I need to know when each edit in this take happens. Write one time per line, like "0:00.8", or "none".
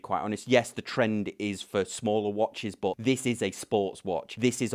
0:03.0